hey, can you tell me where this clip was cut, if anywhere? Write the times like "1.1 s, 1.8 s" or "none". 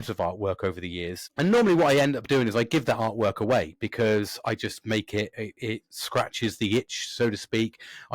1.2 s

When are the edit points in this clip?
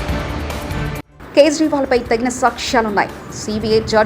1.1 s

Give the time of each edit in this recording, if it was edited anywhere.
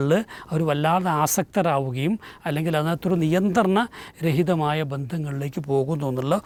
none

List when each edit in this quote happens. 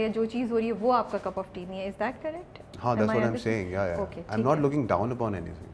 none

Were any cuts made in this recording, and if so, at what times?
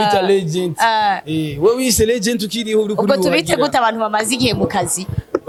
none

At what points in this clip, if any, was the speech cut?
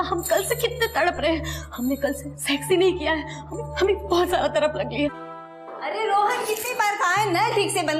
5.3 s

